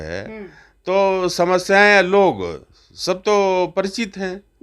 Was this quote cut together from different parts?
no; 0 cuts

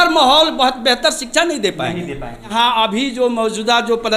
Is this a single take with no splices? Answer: no; 1 cut; at 2.5 s

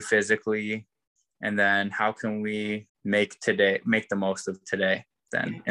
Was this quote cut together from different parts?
yes; 1 cut; at 2.9 s

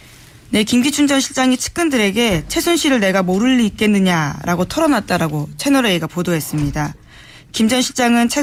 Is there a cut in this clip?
no; 0 cuts

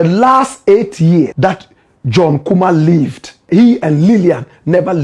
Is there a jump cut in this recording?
yes; 2 cuts; at 1.3 s, 3.4 s

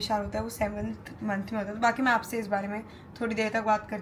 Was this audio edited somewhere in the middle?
no; 0 cuts

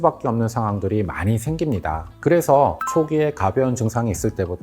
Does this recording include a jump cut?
yes; 1 cut; at 2.1 s

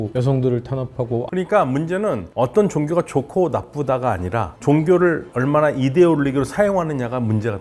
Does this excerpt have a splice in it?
yes; 1 cut; at 1.3 s

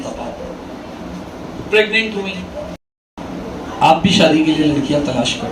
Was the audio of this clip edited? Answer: yes; 1 cut; at 2.8 s

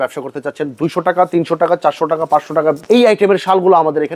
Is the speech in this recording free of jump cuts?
no; 1 cut; at 2.8 s

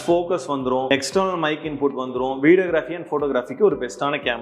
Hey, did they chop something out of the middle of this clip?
yes; 1 cut; at 0.9 s

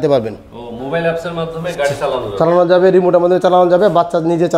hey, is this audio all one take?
yes; 0 cuts

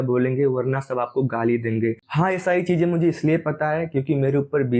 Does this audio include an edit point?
yes; 1 cut; at 2.1 s

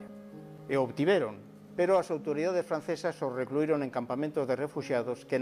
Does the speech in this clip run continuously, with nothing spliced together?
no; 1 cut; at 3.6 s

